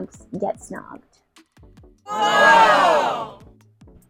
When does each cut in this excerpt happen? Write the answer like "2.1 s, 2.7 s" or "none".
none